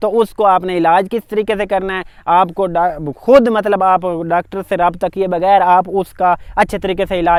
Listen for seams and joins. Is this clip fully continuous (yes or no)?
yes